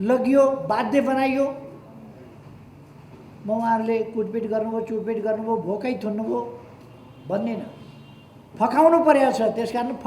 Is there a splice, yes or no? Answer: no